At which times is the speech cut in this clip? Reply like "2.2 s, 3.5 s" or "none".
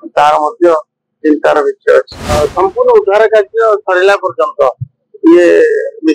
2.2 s